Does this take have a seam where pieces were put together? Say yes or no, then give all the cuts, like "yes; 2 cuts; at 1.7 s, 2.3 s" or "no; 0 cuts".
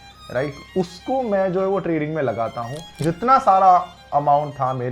yes; 1 cut; at 2.8 s